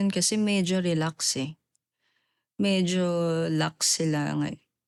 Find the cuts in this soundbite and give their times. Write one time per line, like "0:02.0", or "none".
none